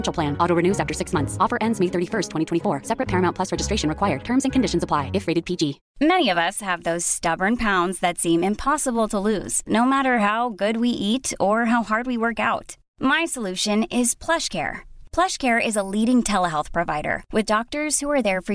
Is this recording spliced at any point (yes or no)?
yes